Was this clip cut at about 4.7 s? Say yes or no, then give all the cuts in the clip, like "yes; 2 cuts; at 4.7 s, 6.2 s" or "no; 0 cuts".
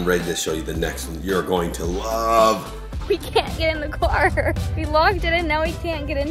yes; 2 cuts; at 3.1 s, 4.7 s